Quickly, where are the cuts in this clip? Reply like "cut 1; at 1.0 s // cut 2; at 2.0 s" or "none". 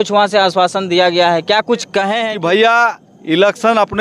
cut 1; at 2.3 s